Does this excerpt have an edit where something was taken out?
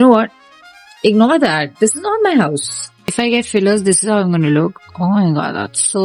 yes; 1 cut; at 3.1 s

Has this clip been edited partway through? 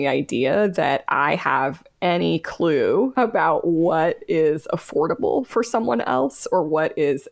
yes; 1 cut; at 3.1 s

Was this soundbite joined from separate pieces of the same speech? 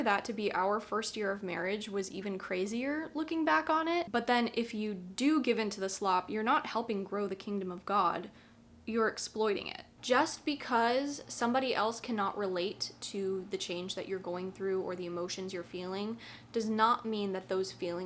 yes; 2 cuts; at 4.1 s, 9.9 s

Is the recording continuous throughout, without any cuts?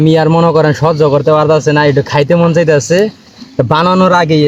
yes; 0 cuts

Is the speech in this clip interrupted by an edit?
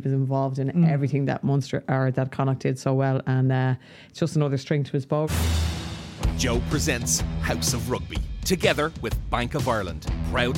yes; 1 cut; at 5.3 s

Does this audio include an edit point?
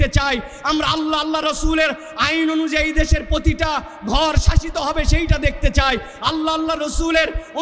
no; 0 cuts

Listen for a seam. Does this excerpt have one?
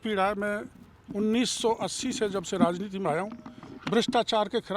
no; 0 cuts

